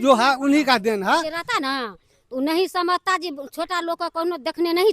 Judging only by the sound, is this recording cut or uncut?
cut